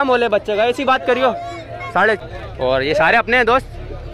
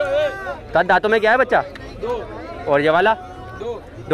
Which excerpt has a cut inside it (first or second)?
first